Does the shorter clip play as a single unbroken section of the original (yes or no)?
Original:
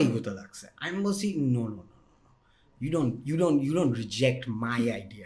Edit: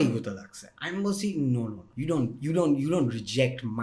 no